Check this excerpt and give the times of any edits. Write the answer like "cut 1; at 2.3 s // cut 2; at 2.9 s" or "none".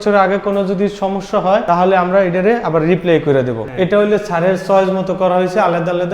cut 1; at 1.6 s // cut 2; at 3.6 s